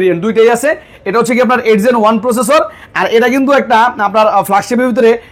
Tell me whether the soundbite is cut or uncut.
uncut